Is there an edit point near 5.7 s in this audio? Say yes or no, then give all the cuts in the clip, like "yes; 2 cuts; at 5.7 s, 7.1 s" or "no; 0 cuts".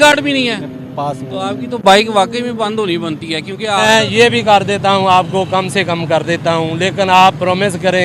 no; 1 cut; at 3.8 s